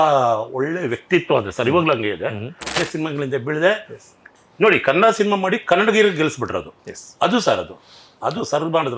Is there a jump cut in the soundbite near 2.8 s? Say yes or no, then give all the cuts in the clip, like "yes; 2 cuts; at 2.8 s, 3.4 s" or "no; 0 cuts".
yes; 1 cut; at 2.8 s